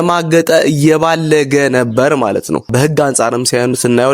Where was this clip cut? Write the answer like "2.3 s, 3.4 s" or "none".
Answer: 2.7 s